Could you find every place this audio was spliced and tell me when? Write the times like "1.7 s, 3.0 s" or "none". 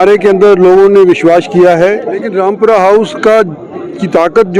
2.3 s